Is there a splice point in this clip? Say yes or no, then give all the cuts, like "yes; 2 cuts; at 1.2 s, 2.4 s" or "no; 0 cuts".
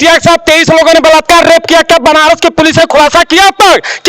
no; 0 cuts